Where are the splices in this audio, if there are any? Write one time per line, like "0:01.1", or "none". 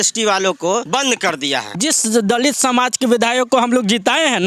0:00.9
0:01.8